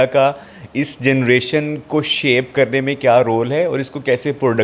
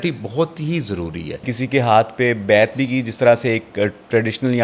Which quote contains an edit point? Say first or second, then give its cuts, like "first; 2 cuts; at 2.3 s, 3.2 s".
second; 1 cut; at 1.6 s